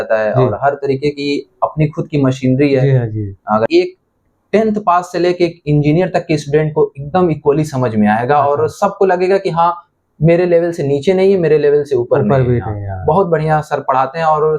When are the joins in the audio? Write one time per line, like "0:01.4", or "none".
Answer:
0:03.7